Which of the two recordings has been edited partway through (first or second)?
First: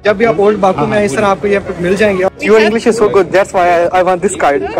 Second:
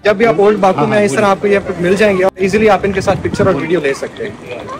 first